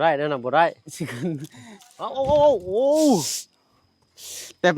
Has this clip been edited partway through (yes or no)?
yes